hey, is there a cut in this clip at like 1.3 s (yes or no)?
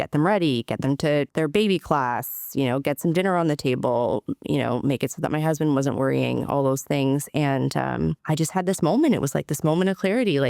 yes